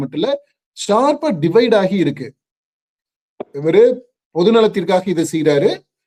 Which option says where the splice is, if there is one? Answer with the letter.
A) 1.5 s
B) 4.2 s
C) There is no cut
C